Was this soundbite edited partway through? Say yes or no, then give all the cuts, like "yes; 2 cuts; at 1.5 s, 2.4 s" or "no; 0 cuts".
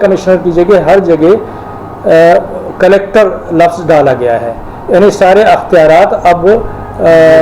no; 0 cuts